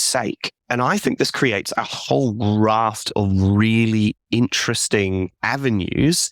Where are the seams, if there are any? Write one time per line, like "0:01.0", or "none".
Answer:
none